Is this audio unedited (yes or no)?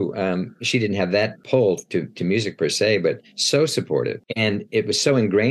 no